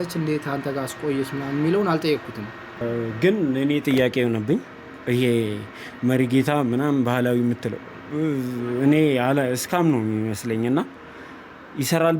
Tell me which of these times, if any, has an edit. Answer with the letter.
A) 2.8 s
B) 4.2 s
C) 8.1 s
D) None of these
A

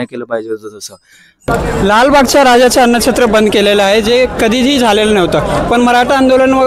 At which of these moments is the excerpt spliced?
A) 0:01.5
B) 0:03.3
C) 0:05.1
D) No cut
A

